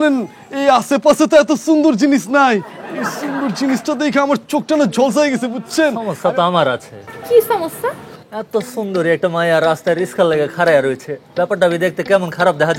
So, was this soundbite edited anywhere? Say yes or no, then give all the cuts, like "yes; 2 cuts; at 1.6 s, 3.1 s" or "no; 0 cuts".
yes; 1 cut; at 6.1 s